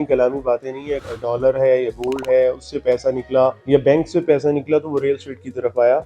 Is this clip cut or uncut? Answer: cut